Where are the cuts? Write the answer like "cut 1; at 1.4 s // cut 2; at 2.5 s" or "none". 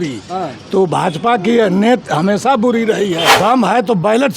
cut 1; at 3.3 s